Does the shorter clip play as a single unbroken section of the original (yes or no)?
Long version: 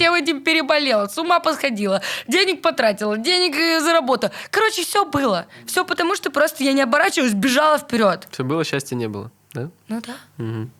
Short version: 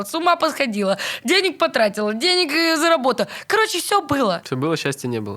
no